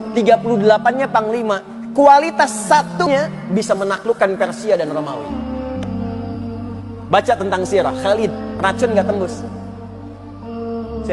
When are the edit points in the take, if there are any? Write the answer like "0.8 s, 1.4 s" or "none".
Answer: 3.1 s